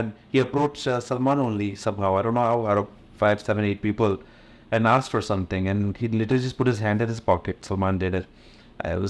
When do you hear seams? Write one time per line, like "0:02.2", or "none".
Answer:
none